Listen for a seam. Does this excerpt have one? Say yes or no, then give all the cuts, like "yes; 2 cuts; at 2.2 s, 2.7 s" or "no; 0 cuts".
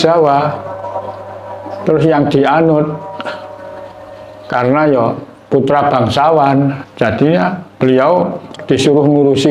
no; 0 cuts